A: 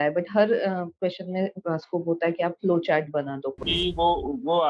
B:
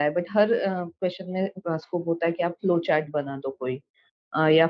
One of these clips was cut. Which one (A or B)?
A